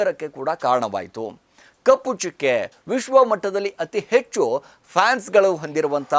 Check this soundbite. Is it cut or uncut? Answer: uncut